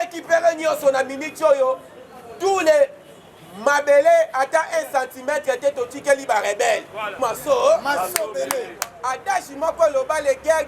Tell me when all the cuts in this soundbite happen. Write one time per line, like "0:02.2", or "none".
0:07.1